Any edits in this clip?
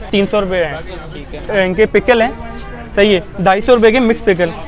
yes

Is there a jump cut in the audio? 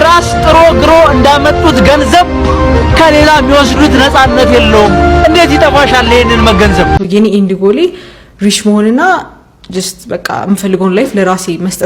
yes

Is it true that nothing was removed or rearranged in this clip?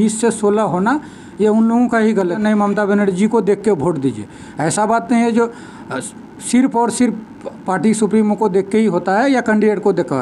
no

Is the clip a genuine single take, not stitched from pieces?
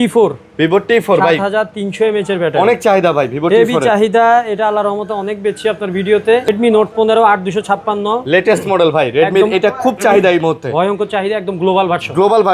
no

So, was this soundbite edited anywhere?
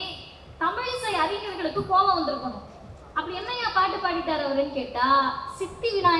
no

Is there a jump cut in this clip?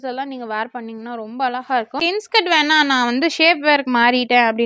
yes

